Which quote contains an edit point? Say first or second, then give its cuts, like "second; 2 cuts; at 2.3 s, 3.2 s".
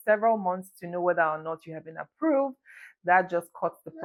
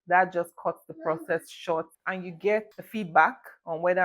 second; 2 cuts; at 2.0 s, 2.8 s